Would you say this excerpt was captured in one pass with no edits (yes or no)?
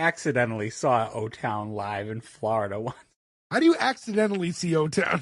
yes